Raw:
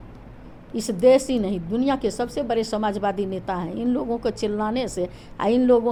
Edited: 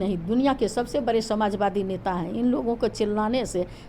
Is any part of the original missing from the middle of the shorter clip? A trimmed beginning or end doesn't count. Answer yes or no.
no